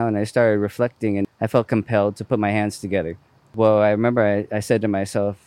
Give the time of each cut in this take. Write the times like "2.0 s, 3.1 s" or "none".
1.3 s, 3.5 s